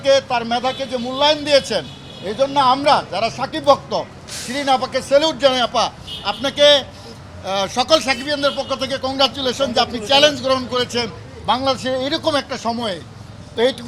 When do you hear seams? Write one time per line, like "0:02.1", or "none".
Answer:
none